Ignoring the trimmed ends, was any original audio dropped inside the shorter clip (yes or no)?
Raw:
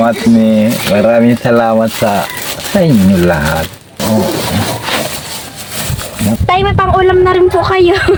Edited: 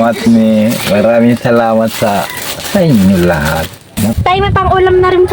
yes